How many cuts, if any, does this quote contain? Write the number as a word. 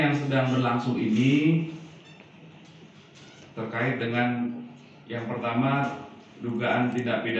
zero